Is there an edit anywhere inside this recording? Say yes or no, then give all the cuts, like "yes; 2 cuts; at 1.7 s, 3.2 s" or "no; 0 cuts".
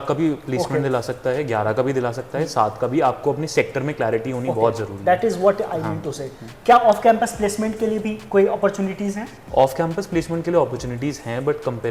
no; 0 cuts